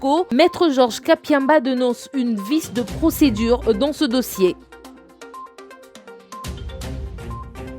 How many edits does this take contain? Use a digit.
1